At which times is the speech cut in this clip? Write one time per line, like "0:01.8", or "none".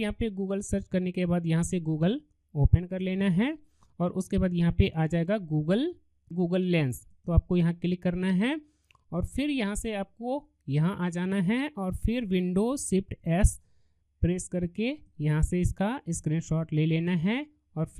0:06.3